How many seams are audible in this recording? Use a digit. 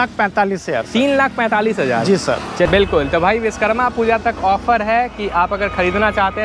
1